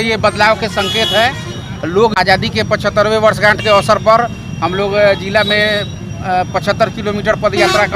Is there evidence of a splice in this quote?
yes; 1 cut; at 2.1 s

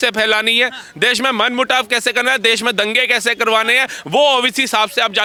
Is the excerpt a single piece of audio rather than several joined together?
yes; 0 cuts

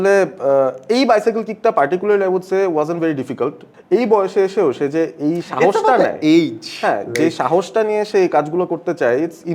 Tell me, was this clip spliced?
yes; 1 cut; at 3.7 s

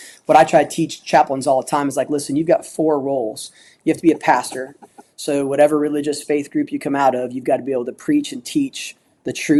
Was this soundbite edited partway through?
no; 0 cuts

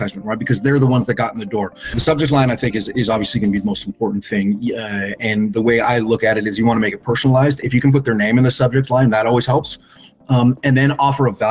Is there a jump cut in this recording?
yes; 1 cut; at 1.9 s

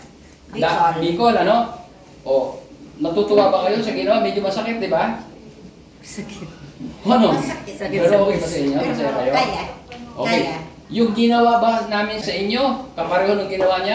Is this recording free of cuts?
no; 1 cut; at 12.2 s

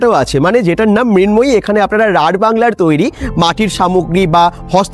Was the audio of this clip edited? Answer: no; 0 cuts

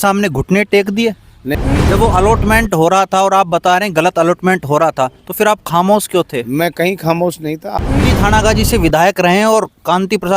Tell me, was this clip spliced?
yes; 2 cuts; at 1.6 s, 7.9 s

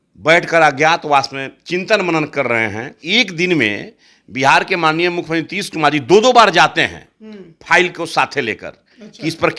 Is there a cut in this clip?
yes; 1 cut; at 3.0 s

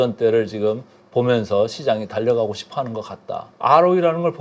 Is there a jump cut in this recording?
yes; 1 cut; at 3.4 s

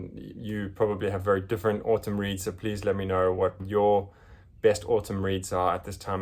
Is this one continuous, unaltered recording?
yes; 0 cuts

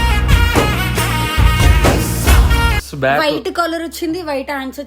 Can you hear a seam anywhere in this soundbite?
yes; 1 cut; at 2.9 s

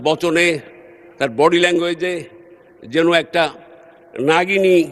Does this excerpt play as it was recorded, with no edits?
yes; 0 cuts

